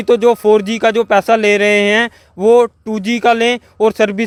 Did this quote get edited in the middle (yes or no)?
no